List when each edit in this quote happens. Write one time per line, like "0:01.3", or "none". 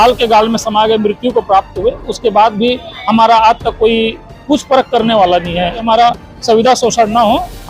0:05.8